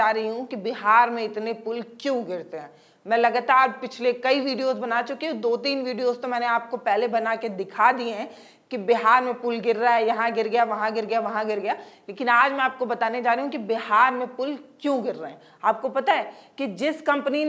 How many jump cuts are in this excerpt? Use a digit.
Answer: 0